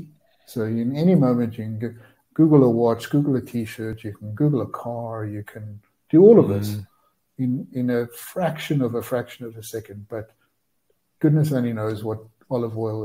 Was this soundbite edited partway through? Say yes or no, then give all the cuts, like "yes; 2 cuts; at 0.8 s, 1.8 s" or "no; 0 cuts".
no; 0 cuts